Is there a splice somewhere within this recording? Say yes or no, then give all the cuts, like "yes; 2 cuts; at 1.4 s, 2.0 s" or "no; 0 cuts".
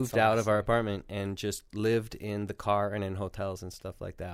no; 0 cuts